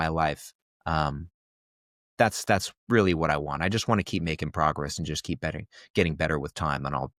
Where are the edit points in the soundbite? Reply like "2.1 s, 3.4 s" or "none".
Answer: none